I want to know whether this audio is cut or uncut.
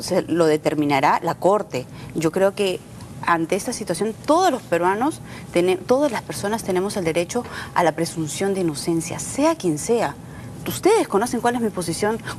uncut